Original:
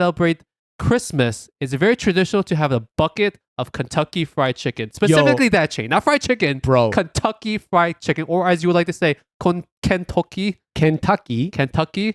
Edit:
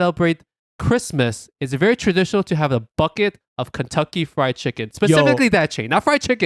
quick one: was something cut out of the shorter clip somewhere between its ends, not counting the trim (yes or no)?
no